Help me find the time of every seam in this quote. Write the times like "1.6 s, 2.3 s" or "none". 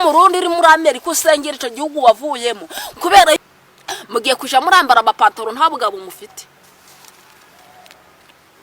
3.4 s